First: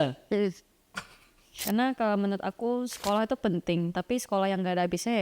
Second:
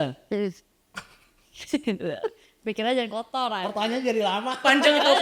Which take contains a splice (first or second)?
first